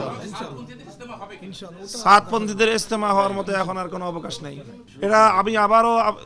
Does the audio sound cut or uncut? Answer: cut